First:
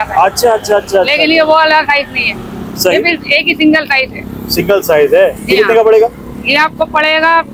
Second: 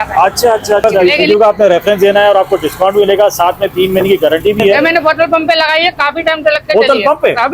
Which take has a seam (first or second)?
second